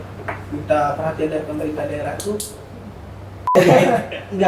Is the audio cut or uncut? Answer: cut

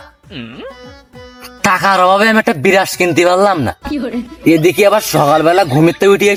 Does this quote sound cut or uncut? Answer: uncut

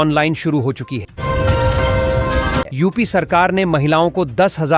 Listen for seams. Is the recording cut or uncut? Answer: cut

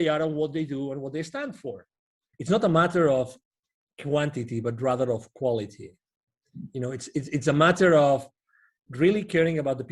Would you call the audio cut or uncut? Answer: cut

